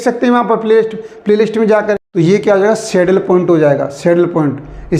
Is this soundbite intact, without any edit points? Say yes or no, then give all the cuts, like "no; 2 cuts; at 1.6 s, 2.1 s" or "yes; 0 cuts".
no; 1 cut; at 2.0 s